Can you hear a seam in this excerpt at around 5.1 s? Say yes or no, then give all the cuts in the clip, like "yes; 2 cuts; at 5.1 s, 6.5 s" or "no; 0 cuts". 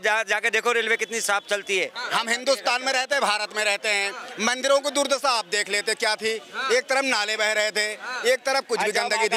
no; 1 cut; at 2.0 s